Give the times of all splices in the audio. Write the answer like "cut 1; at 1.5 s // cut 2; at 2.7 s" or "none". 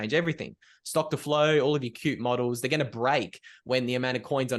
none